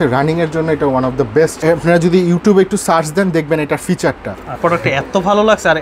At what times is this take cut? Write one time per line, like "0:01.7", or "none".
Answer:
0:01.6
0:04.6